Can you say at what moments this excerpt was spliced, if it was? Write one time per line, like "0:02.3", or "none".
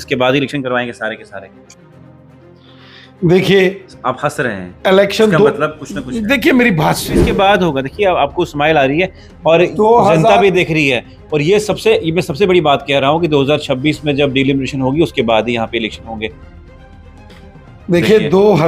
0:07.3